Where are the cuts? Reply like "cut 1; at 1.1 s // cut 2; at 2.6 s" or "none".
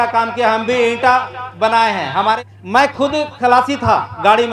cut 1; at 2.4 s // cut 2; at 3.3 s